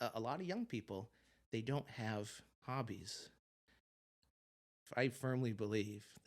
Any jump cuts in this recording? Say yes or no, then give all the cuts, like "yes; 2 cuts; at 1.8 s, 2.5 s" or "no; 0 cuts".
yes; 1 cut; at 4.8 s